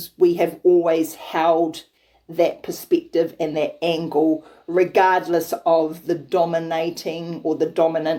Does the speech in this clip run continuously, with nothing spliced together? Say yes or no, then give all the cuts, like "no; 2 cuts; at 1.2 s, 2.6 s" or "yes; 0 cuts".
yes; 0 cuts